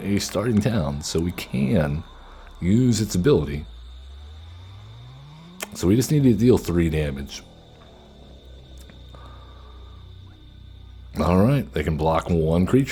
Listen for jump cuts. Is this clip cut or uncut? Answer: uncut